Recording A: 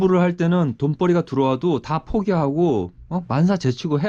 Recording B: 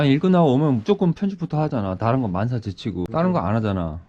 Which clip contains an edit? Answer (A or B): B